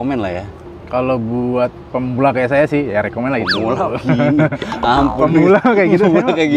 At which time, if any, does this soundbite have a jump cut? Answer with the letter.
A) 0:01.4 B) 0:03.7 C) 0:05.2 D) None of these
D